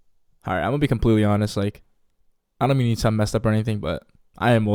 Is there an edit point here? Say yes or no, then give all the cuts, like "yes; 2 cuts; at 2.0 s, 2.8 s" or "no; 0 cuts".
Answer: no; 0 cuts